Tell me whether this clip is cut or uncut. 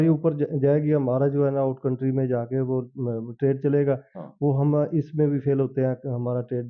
uncut